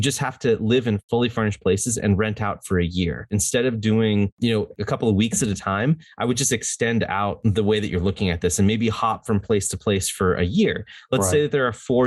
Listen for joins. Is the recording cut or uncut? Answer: cut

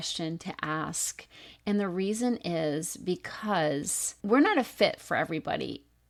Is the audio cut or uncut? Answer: uncut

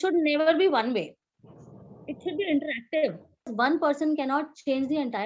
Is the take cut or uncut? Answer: cut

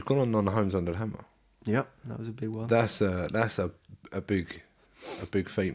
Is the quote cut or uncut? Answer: uncut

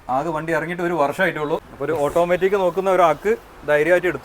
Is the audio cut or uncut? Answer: cut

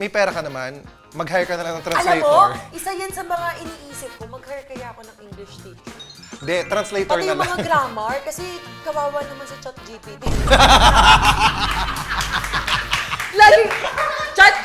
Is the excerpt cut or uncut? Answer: uncut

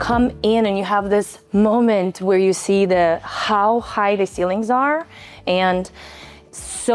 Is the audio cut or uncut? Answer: cut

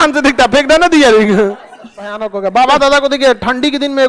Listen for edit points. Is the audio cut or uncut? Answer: cut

